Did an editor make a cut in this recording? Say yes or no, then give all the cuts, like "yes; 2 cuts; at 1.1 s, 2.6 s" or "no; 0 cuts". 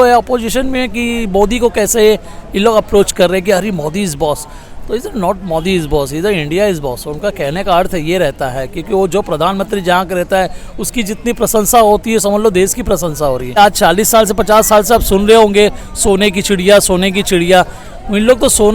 yes; 1 cut; at 13.6 s